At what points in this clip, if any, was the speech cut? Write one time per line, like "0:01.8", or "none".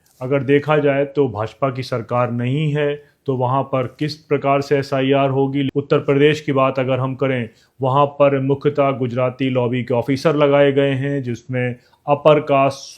0:05.7